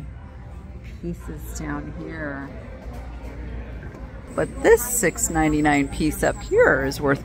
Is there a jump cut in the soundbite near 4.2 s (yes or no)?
yes